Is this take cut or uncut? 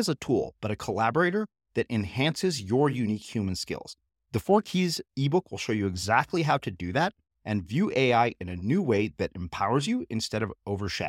uncut